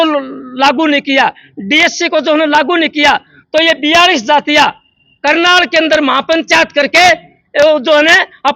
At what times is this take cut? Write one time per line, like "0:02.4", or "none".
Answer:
none